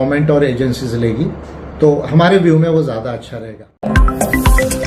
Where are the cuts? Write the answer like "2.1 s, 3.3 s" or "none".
3.8 s